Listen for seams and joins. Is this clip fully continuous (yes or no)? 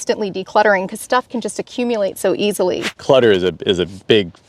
no